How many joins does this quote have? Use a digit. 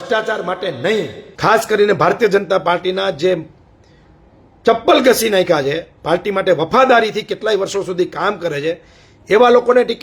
1